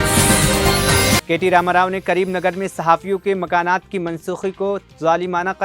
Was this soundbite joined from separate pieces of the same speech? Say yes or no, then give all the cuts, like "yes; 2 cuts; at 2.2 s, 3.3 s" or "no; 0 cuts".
yes; 1 cut; at 1.2 s